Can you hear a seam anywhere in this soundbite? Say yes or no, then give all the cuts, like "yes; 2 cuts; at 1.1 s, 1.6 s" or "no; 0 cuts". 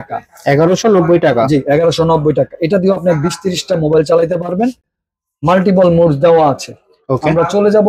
no; 0 cuts